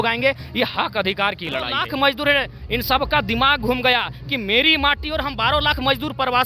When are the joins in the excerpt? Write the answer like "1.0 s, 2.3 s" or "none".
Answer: 1.8 s